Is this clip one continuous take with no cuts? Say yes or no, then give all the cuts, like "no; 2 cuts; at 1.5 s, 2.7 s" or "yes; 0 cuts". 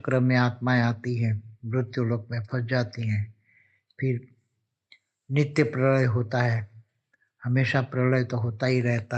yes; 0 cuts